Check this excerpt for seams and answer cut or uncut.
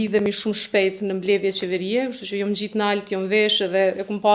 uncut